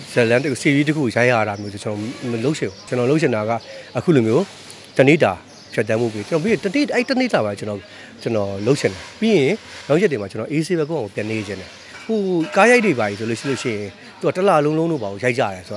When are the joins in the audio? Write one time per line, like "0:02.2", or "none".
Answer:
0:02.8